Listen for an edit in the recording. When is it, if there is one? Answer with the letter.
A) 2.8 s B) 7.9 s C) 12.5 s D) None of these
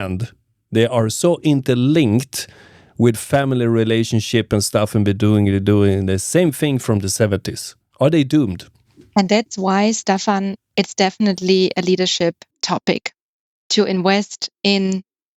C